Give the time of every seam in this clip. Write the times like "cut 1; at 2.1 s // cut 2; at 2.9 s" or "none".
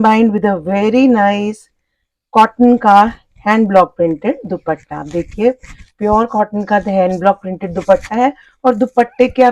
none